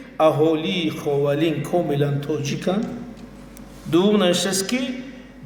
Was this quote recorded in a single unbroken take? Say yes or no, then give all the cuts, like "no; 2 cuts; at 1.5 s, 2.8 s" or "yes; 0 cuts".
yes; 0 cuts